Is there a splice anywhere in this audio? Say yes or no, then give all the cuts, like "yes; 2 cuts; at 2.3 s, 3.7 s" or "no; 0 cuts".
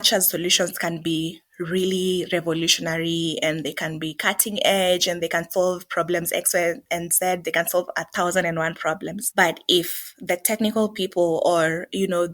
no; 0 cuts